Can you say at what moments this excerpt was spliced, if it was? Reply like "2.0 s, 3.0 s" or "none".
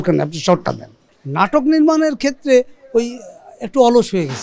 1.1 s